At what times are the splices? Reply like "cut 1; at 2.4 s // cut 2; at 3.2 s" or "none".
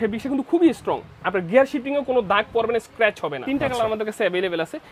cut 1; at 3.4 s